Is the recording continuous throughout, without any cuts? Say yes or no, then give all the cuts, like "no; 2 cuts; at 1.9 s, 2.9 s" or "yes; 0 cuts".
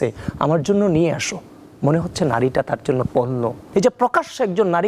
no; 1 cut; at 3.6 s